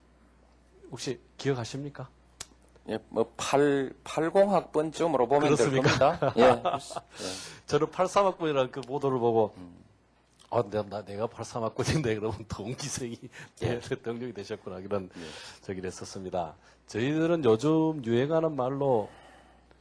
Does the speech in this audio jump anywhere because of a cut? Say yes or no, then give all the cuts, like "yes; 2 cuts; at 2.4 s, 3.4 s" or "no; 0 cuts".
yes; 1 cut; at 13.8 s